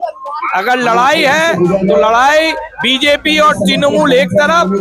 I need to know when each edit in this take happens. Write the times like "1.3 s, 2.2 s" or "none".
none